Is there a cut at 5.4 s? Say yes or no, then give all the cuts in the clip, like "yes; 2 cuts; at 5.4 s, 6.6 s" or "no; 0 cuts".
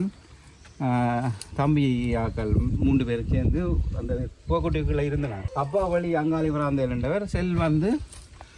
yes; 1 cut; at 5.4 s